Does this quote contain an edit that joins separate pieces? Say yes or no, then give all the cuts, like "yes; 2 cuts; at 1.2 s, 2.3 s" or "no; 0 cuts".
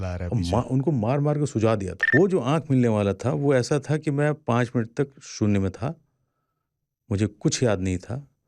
yes; 1 cut; at 1.9 s